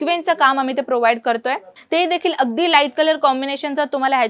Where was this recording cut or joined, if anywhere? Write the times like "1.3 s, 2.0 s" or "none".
1.7 s